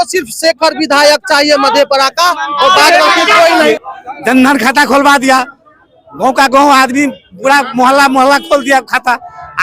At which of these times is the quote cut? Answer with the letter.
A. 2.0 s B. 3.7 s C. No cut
B